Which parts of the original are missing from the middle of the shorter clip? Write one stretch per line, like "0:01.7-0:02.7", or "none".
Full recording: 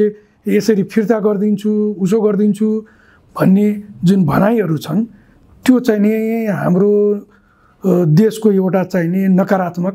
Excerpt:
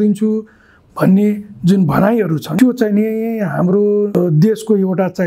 0:04.9-0:05.5
0:07.2-0:07.9